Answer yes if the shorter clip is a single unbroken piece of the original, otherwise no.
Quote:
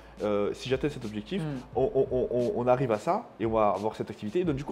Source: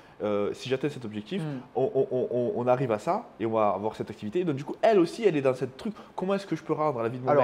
yes